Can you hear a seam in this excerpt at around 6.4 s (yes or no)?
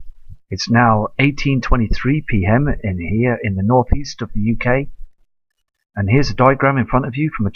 yes